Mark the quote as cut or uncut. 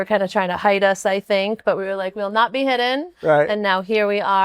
uncut